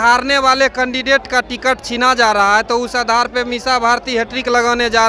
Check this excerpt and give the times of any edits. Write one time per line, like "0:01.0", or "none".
none